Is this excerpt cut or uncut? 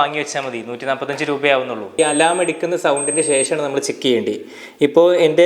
cut